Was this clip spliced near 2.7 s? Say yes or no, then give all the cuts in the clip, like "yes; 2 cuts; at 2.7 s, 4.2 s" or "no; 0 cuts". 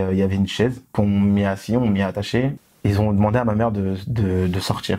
yes; 2 cuts; at 0.9 s, 2.7 s